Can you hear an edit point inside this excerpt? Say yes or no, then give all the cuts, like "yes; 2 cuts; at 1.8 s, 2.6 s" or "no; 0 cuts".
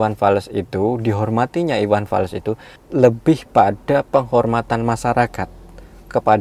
no; 0 cuts